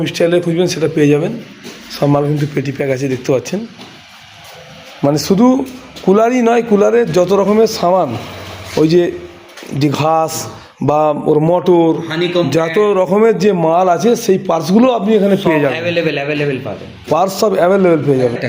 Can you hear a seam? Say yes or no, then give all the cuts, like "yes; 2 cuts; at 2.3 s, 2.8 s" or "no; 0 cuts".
no; 0 cuts